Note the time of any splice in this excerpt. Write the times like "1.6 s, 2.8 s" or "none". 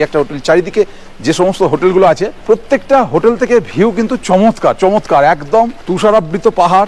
2.3 s, 5.8 s